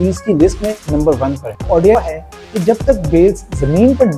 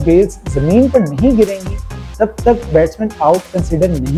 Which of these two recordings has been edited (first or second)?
first